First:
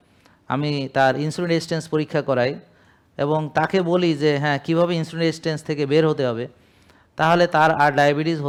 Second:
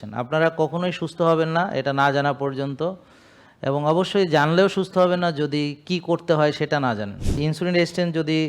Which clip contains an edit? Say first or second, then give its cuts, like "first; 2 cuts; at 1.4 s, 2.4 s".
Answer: second; 1 cut; at 7.4 s